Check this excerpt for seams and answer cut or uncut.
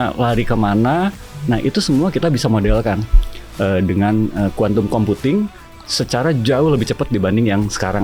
cut